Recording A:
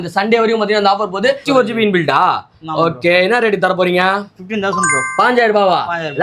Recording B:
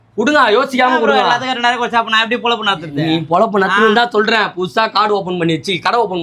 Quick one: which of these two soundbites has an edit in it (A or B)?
A